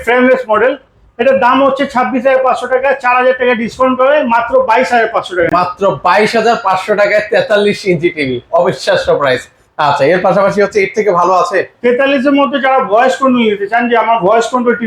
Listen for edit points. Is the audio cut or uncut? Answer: uncut